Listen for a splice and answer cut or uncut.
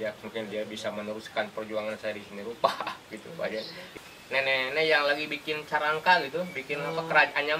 cut